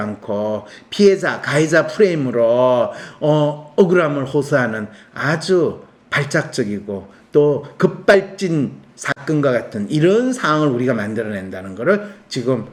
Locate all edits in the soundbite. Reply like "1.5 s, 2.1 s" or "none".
none